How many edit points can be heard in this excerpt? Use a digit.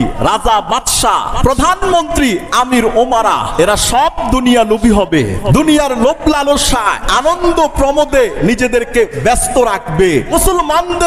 5